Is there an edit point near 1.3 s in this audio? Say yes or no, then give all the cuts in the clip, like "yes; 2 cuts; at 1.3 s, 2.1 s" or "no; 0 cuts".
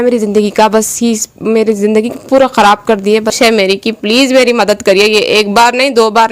no; 1 cut; at 3.3 s